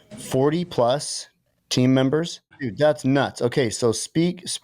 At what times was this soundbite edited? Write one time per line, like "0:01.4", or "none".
0:02.6